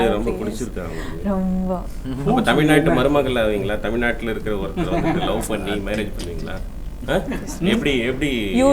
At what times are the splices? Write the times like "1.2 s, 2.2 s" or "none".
none